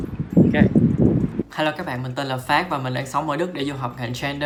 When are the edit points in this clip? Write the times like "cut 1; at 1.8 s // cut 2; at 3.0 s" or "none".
none

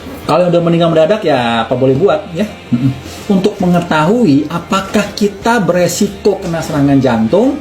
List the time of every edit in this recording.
cut 1; at 3.2 s // cut 2; at 4.2 s

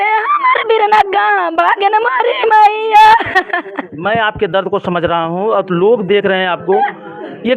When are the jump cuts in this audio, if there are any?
none

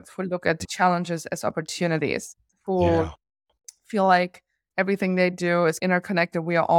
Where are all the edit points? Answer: none

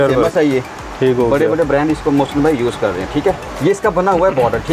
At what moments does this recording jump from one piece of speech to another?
cut 1; at 3.5 s

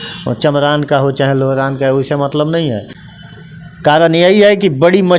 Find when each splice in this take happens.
cut 1; at 3.0 s

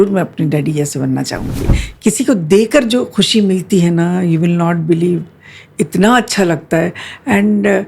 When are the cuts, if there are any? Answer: cut 1; at 1.7 s

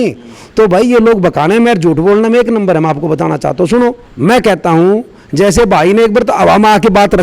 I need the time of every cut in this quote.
cut 1; at 4.1 s

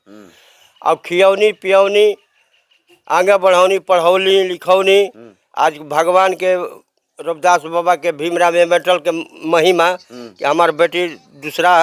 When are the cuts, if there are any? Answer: none

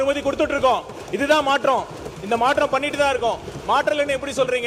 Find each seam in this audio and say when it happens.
none

